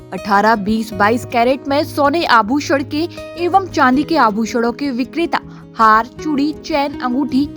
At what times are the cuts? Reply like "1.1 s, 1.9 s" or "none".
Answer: none